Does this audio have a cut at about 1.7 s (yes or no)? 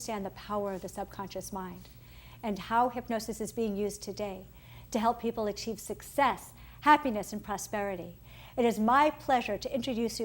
no